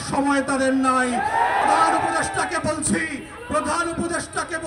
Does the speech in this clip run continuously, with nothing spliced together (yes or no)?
no